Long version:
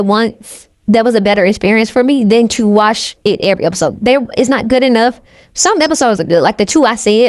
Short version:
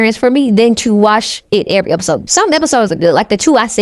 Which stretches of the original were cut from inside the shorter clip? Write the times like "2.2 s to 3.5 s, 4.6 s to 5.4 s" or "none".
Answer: 4.0 s to 5.5 s